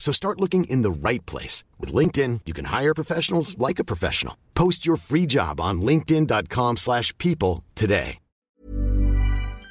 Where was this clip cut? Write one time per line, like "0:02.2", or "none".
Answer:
0:08.4